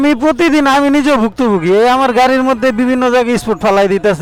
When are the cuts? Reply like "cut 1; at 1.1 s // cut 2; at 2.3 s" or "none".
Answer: none